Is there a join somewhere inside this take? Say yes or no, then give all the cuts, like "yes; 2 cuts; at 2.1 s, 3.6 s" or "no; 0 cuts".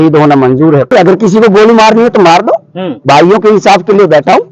yes; 1 cut; at 0.9 s